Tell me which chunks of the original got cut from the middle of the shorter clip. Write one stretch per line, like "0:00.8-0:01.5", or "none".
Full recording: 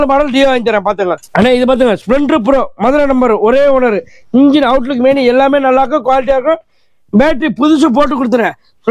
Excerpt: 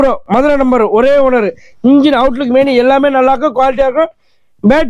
none